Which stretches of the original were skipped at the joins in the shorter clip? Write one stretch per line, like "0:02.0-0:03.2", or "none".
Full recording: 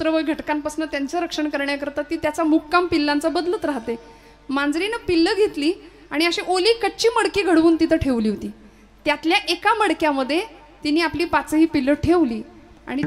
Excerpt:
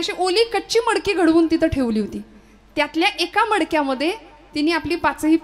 none